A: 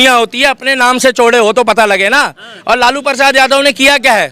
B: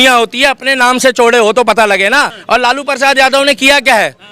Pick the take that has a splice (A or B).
B